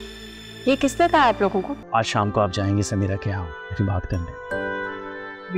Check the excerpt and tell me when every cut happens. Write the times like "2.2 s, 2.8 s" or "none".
1.8 s